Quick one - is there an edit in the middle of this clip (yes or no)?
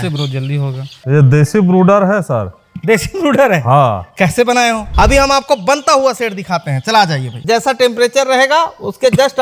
yes